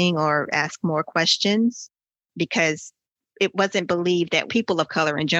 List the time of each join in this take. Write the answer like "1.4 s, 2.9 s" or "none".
3.1 s, 4.5 s